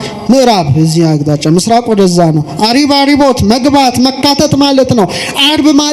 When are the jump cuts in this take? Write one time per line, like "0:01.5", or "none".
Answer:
none